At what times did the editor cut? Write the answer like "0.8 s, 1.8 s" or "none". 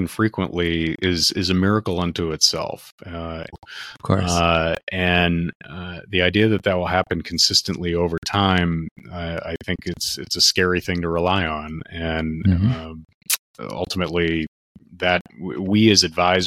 3.5 s